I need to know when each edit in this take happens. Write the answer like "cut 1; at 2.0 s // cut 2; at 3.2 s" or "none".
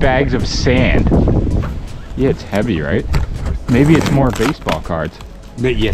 cut 1; at 1.7 s